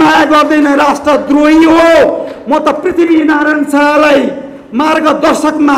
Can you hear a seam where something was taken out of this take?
no; 0 cuts

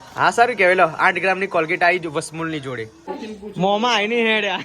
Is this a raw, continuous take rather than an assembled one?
no; 1 cut; at 3.0 s

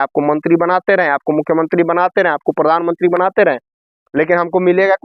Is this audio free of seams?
yes; 0 cuts

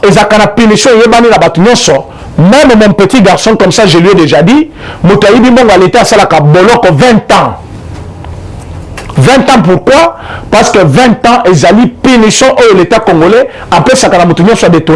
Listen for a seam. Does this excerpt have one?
no; 0 cuts

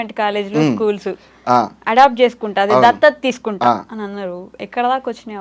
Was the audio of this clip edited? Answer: no; 0 cuts

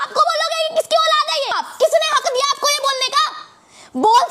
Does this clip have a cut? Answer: yes; 1 cut; at 1.7 s

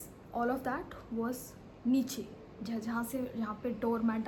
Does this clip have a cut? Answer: no; 0 cuts

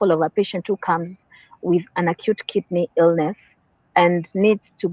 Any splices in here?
no; 0 cuts

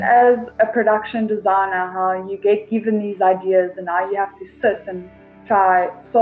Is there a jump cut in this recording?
no; 0 cuts

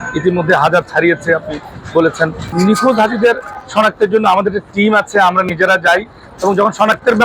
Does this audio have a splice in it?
yes; 1 cut; at 2.5 s

